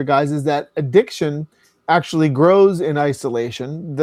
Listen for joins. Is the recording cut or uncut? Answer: uncut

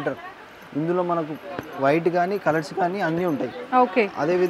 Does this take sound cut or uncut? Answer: uncut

